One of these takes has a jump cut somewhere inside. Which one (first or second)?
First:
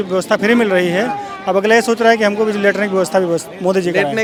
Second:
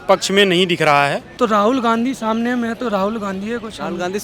second